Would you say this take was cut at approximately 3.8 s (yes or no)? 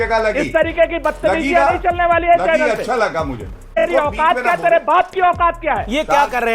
yes